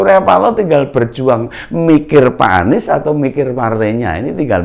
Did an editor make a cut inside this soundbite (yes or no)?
no